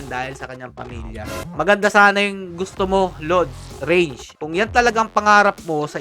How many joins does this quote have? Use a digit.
2